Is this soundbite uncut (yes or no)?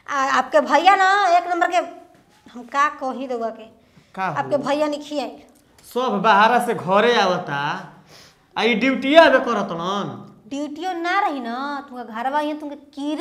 yes